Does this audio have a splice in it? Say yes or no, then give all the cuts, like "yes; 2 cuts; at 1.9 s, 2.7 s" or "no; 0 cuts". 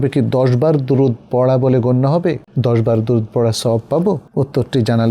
yes; 2 cuts; at 2.5 s, 4.2 s